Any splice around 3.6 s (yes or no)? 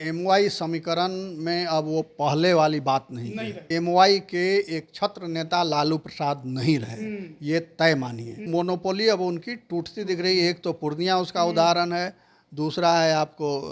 yes